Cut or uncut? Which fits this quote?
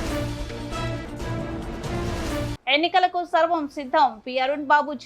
cut